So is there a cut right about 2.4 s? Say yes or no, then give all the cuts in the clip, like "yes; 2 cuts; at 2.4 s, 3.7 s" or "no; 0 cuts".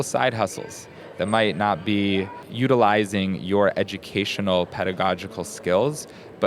yes; 1 cut; at 2.4 s